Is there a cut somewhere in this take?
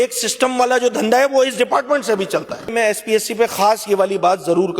yes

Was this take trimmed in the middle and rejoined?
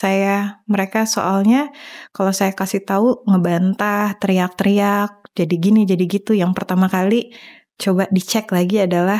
no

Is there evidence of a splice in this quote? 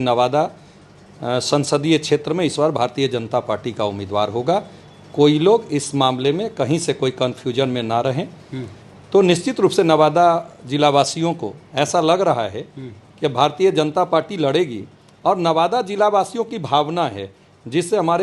no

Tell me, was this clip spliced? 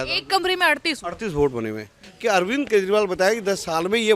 yes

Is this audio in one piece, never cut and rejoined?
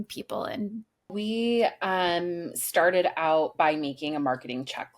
no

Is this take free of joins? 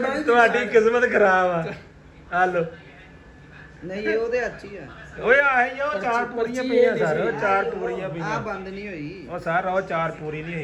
yes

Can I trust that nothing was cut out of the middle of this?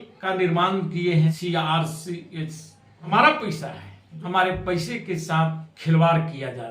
no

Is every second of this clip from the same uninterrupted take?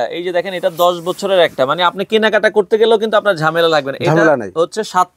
yes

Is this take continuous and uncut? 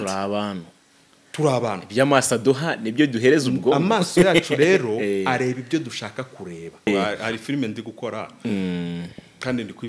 no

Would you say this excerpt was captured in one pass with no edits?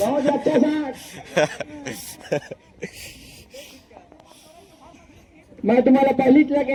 yes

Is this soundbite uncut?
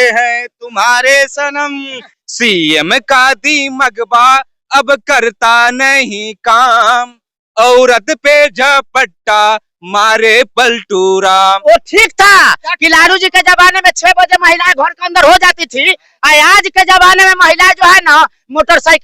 no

